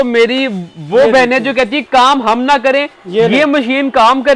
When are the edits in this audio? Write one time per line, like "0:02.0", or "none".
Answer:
none